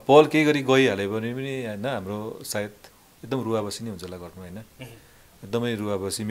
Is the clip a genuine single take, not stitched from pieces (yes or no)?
yes